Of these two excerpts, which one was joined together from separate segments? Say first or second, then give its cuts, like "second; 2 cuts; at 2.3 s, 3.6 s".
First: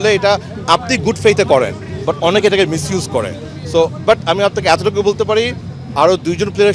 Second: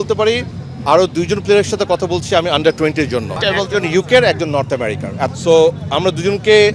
second; 2 cuts; at 3.4 s, 5.3 s